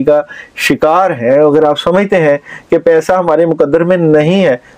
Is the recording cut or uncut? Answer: uncut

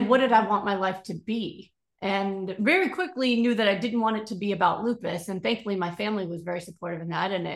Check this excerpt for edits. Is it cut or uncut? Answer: uncut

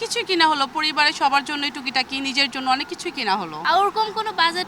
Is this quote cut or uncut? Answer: cut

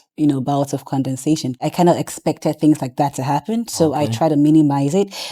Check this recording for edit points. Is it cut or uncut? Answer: cut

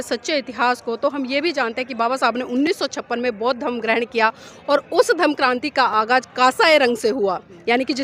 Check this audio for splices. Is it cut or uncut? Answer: uncut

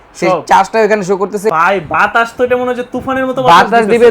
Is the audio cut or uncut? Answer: cut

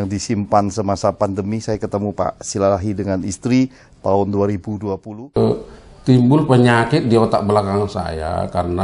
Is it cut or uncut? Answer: cut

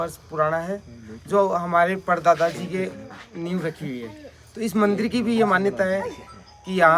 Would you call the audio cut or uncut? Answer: uncut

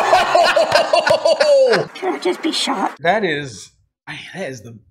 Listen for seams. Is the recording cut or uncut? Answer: cut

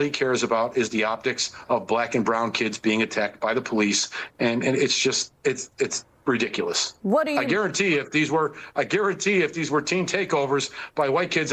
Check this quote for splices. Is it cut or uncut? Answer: uncut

